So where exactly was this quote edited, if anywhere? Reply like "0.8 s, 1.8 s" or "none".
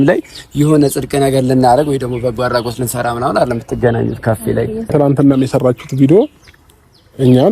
4.9 s